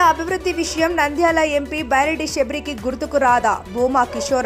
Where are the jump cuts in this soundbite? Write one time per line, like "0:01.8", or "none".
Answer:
none